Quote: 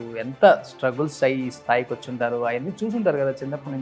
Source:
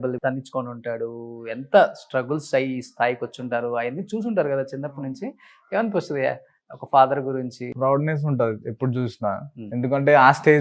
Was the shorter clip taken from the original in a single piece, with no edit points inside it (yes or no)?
yes